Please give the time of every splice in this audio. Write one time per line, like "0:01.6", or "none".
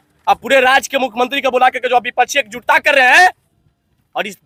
none